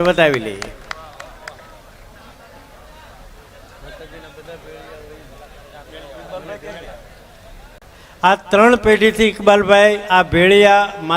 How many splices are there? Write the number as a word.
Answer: one